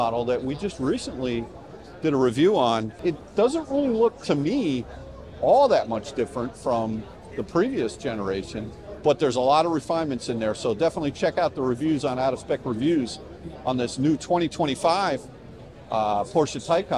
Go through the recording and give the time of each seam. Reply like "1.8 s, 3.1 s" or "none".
2.9 s